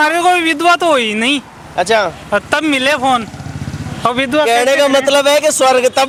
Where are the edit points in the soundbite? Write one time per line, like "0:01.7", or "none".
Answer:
none